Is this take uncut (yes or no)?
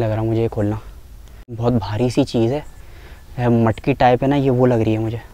no